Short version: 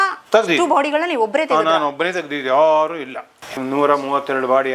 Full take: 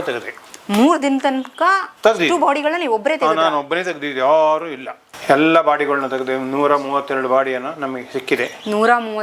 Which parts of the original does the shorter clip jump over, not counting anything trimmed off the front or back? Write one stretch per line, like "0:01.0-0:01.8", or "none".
0:05.2-0:06.3